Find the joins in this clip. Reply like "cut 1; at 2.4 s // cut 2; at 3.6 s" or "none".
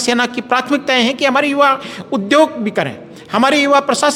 none